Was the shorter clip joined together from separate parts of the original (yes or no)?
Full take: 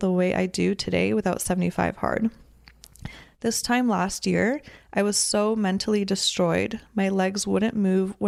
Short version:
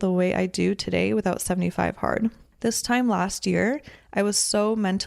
yes